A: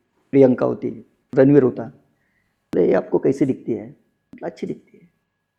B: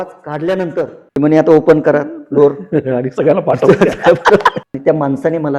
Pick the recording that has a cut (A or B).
B